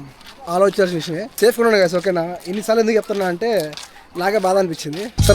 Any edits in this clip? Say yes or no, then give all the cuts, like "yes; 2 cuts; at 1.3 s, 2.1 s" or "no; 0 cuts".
yes; 1 cut; at 1.2 s